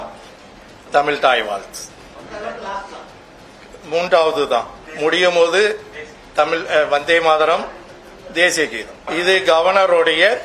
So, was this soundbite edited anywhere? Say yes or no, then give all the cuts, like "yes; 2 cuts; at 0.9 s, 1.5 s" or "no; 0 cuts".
yes; 3 cuts; at 2.1 s, 4.8 s, 9.1 s